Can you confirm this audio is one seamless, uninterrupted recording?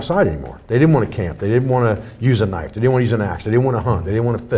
yes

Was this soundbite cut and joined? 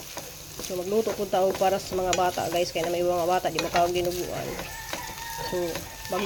no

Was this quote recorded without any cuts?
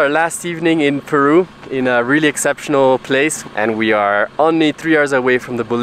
no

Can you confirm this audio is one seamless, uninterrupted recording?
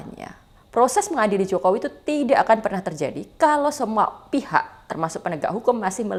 yes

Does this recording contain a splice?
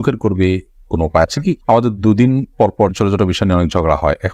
no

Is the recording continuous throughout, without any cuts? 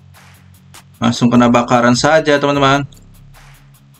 yes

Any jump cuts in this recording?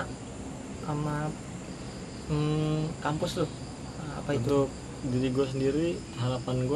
no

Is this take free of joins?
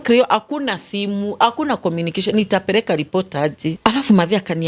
no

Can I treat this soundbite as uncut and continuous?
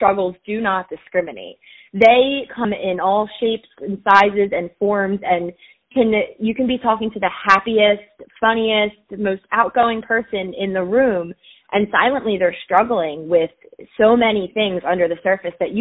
yes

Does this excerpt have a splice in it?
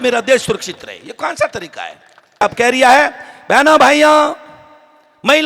yes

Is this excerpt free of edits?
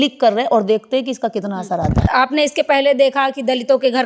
no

